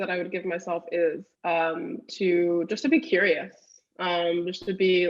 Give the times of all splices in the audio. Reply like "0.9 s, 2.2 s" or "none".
1.3 s